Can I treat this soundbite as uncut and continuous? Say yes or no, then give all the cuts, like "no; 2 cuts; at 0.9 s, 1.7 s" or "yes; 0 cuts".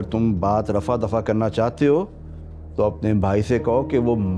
yes; 0 cuts